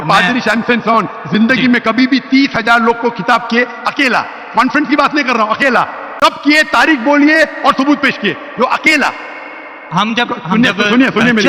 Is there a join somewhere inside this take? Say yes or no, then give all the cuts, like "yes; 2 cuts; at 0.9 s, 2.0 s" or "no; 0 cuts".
no; 0 cuts